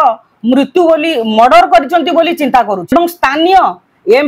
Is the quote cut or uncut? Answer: cut